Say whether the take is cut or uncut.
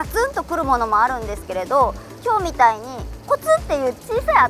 uncut